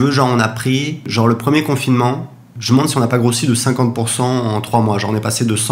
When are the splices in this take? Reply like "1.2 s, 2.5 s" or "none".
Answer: 1.1 s, 2.5 s